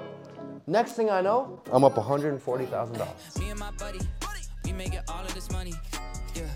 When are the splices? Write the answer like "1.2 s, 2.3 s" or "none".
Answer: 3.3 s